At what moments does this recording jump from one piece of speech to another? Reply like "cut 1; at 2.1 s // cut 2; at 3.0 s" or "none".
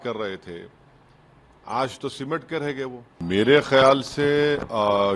cut 1; at 3.2 s